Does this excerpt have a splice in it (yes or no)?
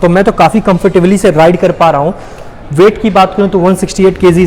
no